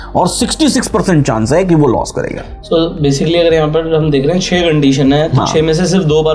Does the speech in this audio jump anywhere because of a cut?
no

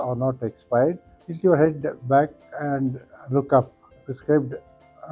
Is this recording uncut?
no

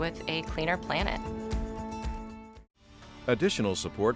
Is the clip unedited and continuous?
no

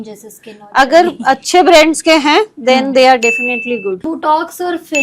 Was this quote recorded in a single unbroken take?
no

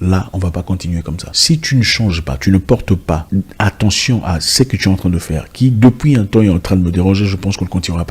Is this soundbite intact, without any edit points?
no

